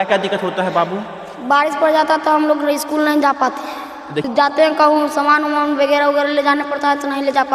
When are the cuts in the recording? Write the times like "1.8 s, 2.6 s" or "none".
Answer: 4.3 s